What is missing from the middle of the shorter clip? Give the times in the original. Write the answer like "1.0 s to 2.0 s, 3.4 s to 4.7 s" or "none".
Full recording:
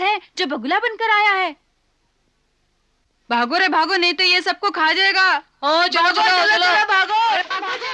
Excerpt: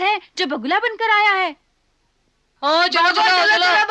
2.5 s to 5.5 s